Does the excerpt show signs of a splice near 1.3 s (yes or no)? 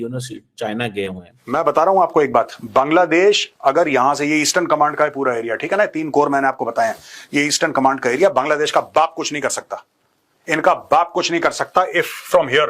yes